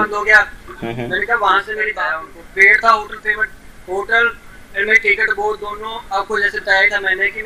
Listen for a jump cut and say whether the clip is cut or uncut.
cut